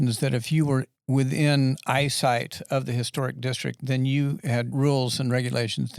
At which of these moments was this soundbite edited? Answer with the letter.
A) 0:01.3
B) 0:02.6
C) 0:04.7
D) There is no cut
C